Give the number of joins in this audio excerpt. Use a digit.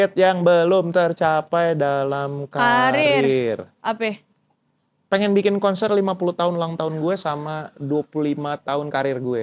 0